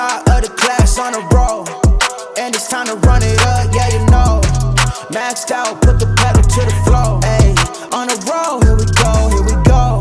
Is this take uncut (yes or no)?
yes